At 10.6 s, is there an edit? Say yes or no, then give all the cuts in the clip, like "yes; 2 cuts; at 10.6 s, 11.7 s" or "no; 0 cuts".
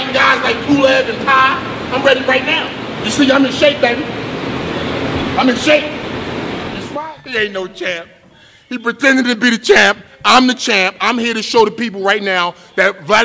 yes; 1 cut; at 10.6 s